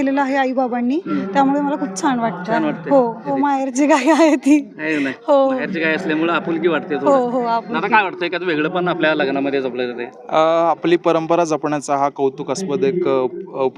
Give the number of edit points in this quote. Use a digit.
1